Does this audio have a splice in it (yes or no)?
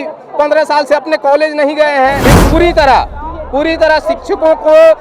yes